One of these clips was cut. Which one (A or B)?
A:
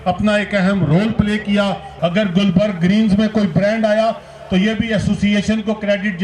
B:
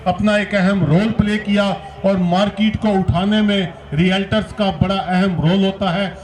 A